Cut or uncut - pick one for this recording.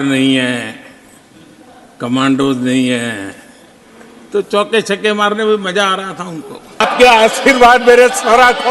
cut